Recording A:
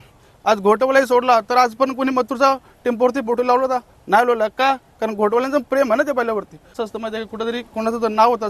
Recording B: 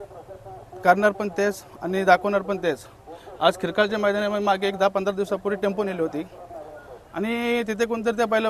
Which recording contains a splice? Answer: A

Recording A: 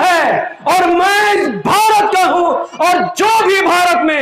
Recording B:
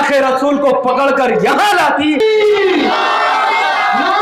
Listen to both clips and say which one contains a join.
B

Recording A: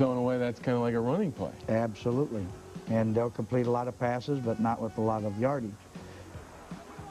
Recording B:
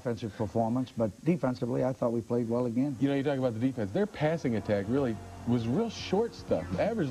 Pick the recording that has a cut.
A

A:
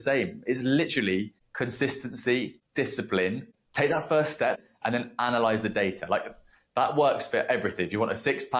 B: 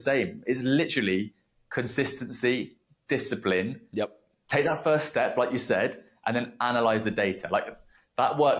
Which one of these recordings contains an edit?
A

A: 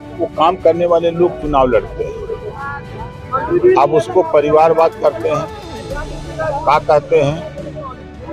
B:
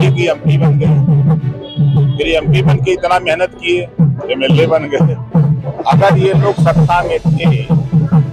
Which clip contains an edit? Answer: B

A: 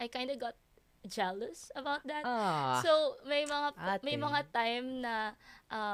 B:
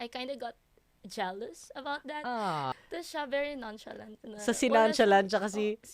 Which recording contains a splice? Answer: B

